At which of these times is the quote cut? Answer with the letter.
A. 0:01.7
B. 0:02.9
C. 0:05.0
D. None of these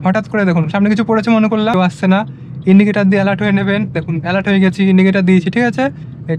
A